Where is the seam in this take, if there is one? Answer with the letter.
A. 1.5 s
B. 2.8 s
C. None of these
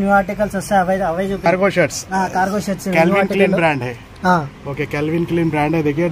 A